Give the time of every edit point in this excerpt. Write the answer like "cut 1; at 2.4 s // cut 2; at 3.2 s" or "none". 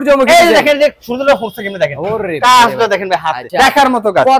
none